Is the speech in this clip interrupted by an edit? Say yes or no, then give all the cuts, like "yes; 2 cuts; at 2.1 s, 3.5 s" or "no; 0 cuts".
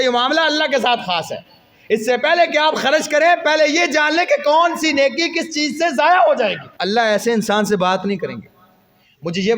yes; 1 cut; at 6.7 s